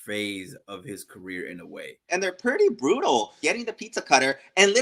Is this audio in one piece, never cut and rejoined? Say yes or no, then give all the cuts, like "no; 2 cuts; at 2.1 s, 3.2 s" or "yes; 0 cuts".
no; 2 cuts; at 2.1 s, 3.4 s